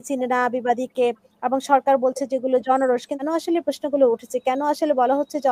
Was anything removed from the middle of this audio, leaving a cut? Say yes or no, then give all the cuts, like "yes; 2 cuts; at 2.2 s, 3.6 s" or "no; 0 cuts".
yes; 1 cut; at 3.2 s